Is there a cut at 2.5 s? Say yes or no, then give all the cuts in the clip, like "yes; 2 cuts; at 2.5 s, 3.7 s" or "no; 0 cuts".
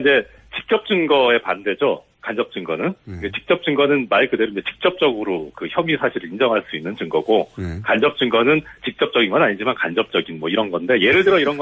yes; 1 cut; at 2.5 s